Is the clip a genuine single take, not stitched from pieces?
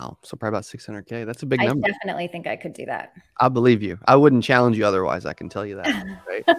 yes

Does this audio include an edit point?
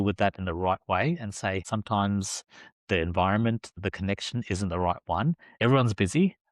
yes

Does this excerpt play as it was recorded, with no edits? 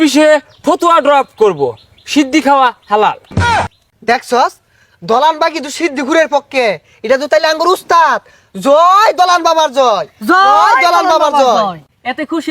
yes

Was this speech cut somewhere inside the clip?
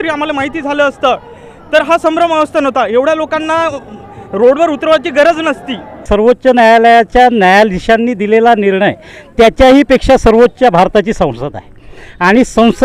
yes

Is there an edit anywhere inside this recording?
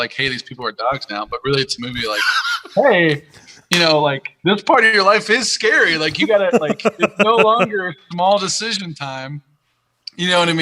no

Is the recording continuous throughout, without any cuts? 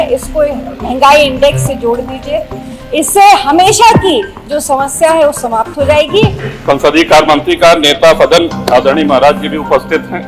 no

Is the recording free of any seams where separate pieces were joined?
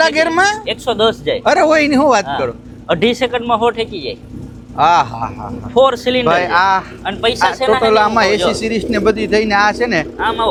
yes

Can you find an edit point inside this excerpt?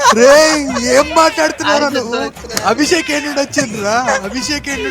no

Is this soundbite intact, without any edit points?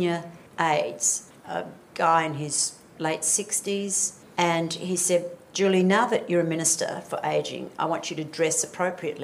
yes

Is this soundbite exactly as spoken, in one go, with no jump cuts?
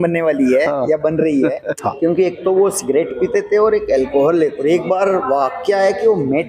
no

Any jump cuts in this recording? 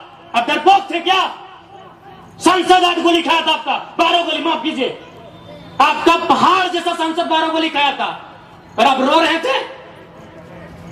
no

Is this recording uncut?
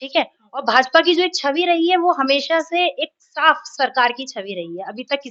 yes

